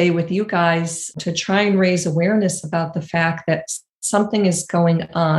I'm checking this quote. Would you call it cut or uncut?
cut